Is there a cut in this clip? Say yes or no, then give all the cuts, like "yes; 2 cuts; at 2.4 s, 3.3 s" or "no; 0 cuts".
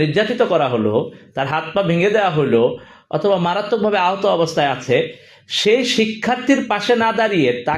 no; 0 cuts